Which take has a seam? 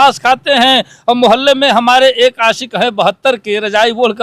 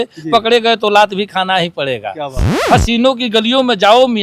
second; 1 cut; at 2.5 s

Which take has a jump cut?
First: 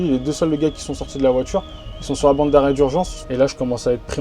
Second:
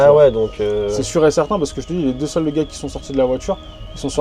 first; 1 cut; at 3.2 s

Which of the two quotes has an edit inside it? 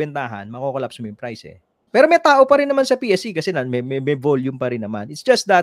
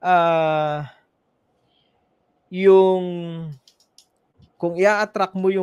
first; 1 cut; at 1.7 s

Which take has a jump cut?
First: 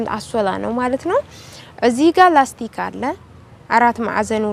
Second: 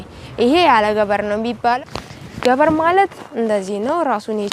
second; 1 cut; at 1.8 s

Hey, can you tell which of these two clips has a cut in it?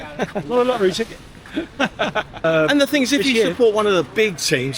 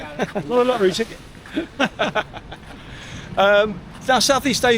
first; 1 cut; at 2.4 s

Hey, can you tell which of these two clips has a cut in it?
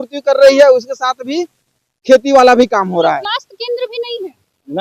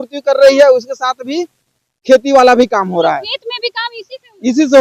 first; 1 cut; at 3.2 s

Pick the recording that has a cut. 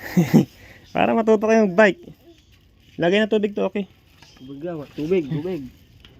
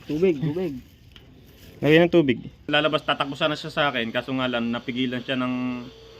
second; 1 cut; at 2.7 s

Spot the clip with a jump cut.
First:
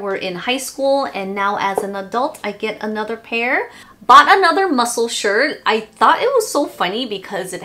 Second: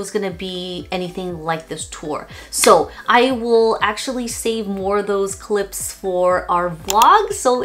first; 1 cut; at 3.8 s

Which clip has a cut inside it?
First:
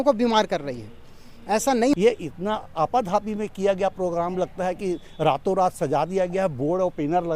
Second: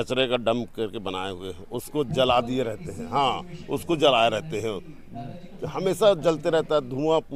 first; 1 cut; at 1.9 s

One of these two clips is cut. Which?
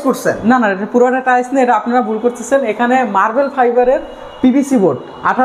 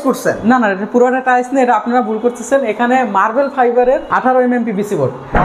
second; 1 cut; at 4.1 s

